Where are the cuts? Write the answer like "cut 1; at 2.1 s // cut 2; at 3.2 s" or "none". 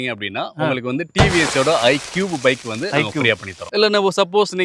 cut 1; at 3.6 s